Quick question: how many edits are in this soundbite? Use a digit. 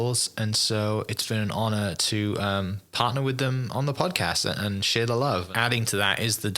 1